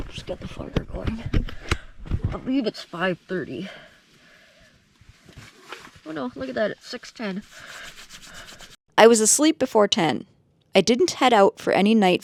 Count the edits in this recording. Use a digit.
0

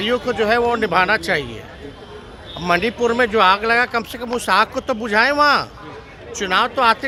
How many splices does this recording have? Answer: 0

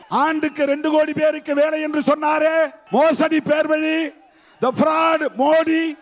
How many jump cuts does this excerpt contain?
1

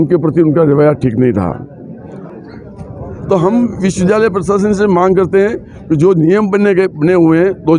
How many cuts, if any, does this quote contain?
1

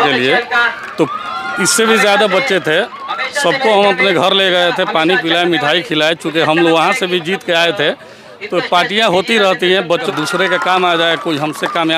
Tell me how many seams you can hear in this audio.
1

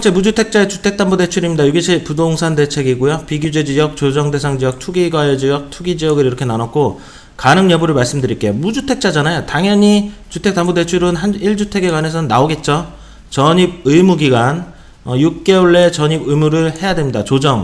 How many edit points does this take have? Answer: 0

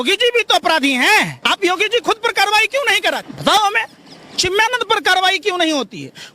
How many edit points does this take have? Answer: 2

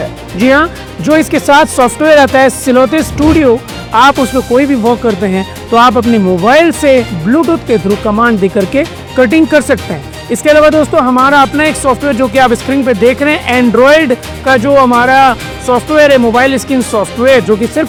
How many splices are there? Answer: 0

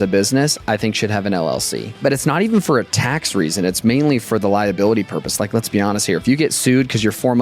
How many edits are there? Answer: 1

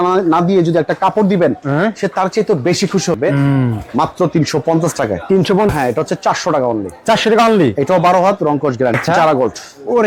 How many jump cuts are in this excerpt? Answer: 3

